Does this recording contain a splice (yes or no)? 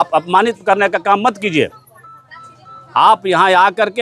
no